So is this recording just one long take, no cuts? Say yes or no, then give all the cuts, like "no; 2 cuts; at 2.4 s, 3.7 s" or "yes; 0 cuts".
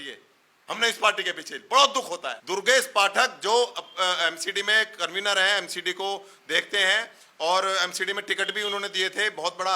no; 1 cut; at 2.3 s